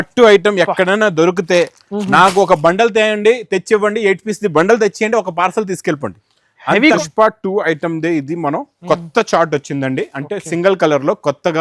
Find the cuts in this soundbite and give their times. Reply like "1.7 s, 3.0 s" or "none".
7.0 s